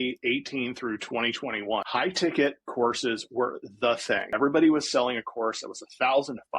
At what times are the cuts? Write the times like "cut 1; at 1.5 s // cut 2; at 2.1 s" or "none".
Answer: cut 1; at 1.9 s // cut 2; at 4.3 s